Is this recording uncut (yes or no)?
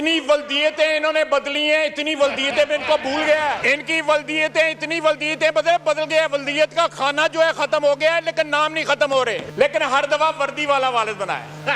no